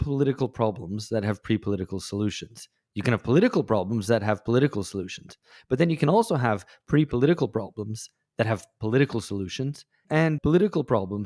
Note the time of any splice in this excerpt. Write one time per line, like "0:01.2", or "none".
0:10.2